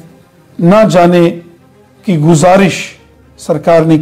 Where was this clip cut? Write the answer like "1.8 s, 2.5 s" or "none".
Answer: none